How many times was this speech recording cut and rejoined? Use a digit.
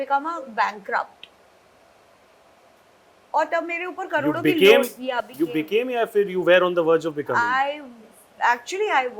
0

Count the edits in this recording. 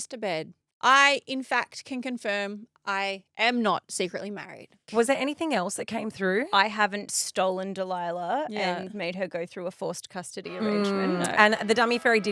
1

